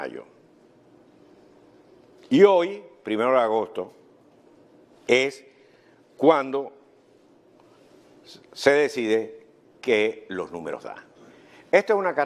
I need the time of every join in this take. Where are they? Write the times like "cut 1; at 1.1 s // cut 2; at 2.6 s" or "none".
cut 1; at 3.1 s